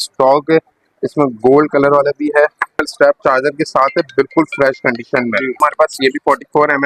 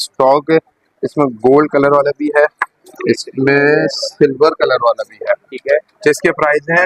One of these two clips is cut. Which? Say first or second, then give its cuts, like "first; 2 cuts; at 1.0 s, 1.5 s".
first; 2 cuts; at 2.9 s, 5.6 s